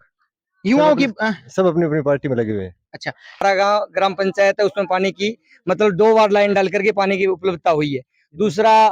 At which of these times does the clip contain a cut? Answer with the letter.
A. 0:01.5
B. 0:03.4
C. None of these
B